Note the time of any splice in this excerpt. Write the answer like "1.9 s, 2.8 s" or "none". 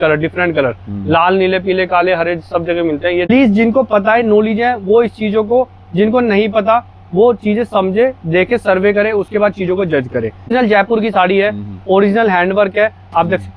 3.3 s, 10.5 s